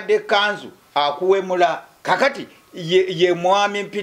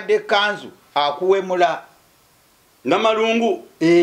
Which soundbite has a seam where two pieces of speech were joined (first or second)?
first